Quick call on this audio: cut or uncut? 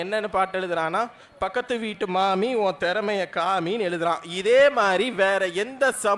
uncut